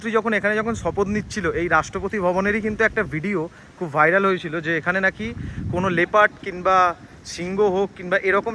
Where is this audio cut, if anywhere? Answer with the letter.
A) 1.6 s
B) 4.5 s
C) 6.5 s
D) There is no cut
D